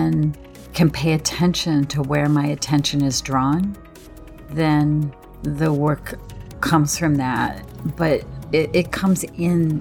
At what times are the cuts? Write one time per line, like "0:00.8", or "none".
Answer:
none